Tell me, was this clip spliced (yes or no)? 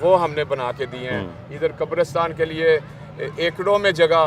no